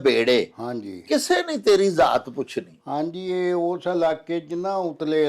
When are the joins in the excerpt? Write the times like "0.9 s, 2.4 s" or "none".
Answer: none